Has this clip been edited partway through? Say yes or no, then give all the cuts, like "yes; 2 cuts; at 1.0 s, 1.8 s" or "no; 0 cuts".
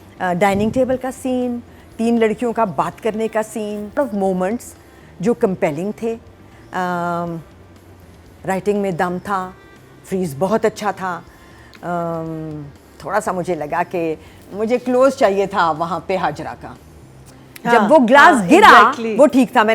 yes; 1 cut; at 4.0 s